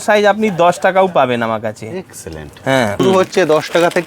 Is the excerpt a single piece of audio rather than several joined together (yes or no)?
no